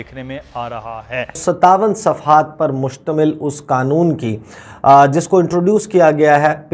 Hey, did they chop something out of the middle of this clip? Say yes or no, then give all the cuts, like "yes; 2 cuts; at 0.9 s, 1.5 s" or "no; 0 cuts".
yes; 1 cut; at 1.4 s